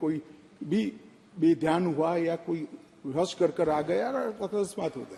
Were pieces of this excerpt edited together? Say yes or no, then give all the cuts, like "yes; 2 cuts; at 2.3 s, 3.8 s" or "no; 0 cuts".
no; 0 cuts